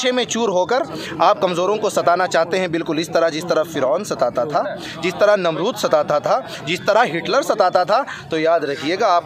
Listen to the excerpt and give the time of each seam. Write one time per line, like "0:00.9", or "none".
none

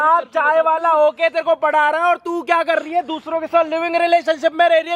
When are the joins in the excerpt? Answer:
none

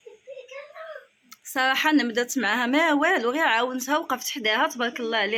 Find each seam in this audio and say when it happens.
none

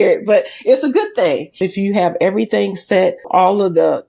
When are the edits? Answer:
0:01.6
0:03.3

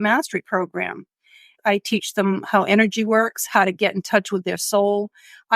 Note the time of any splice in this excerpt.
0:01.5

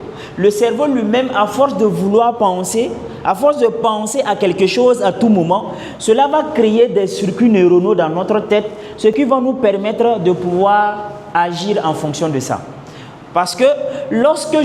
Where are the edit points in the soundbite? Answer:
none

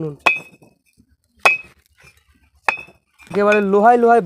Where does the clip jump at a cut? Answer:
0:03.4

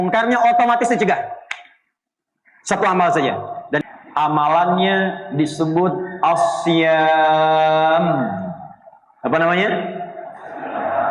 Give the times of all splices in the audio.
0:03.8

